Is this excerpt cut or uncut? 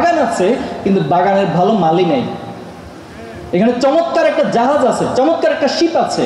uncut